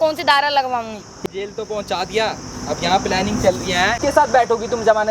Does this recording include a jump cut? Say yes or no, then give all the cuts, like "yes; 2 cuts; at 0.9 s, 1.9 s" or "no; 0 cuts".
yes; 2 cuts; at 1.2 s, 4.0 s